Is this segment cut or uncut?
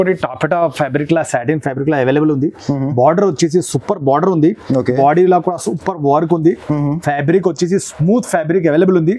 uncut